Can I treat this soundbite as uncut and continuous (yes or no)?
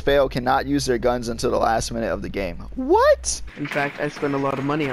no